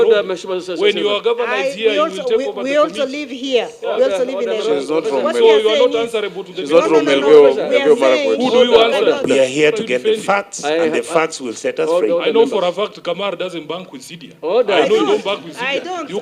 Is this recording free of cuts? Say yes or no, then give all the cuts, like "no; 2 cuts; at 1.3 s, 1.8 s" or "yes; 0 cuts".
no; 1 cut; at 9.3 s